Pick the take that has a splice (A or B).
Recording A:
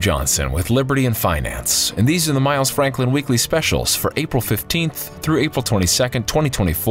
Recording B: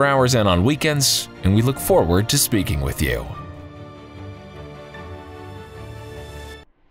B